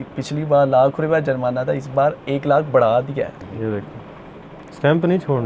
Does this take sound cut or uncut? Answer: cut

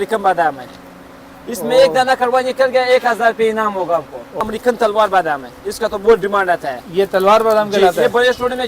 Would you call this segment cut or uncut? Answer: cut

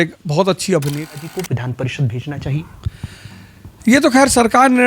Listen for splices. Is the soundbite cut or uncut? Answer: cut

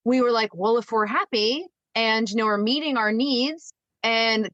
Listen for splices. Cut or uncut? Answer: uncut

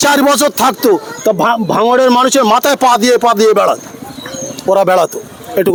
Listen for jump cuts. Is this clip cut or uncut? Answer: uncut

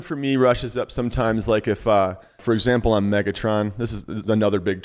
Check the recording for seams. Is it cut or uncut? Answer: cut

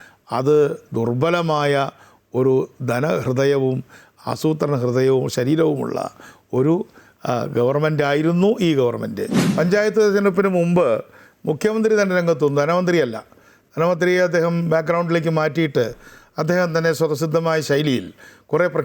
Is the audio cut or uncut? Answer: cut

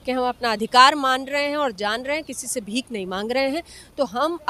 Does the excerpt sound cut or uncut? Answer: uncut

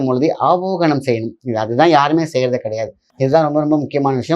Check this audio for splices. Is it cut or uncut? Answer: cut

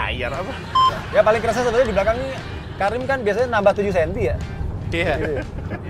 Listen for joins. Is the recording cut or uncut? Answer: cut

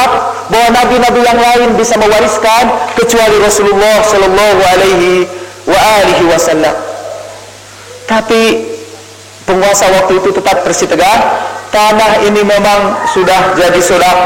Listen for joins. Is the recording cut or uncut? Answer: uncut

